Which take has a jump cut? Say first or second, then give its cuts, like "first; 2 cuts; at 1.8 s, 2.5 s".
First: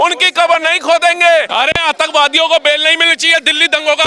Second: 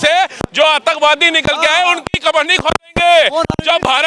first; 1 cut; at 1.5 s